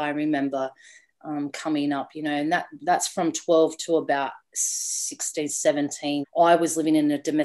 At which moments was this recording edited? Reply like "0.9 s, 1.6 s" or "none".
6.2 s